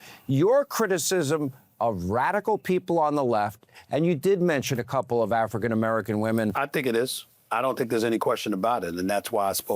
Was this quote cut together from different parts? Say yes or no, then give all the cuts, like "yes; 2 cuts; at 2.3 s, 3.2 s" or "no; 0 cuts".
yes; 1 cut; at 6.5 s